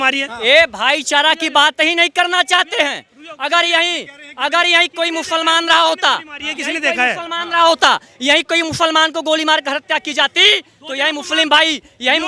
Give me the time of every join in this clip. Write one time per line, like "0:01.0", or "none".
none